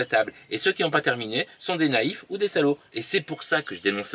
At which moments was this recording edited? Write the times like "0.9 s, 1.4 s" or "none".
2.9 s